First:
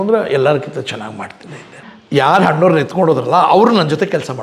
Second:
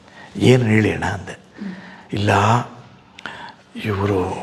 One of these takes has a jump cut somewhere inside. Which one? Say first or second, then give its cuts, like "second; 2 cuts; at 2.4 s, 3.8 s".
first; 1 cut; at 1.9 s